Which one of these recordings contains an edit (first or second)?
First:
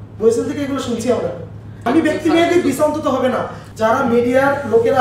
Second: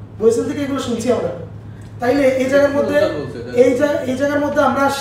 first